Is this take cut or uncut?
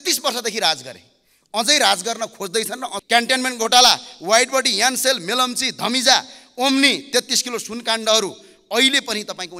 cut